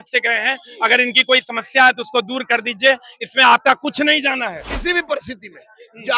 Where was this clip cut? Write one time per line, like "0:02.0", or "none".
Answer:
0:04.7